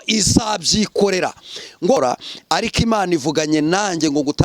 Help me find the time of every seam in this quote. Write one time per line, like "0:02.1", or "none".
0:02.0